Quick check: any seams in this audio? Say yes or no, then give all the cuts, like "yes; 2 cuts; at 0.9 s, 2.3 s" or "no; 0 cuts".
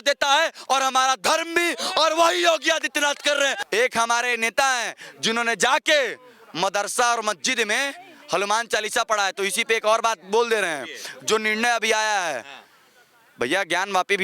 yes; 1 cut; at 3.6 s